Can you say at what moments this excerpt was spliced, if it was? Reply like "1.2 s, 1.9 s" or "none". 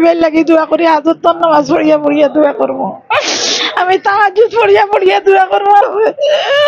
none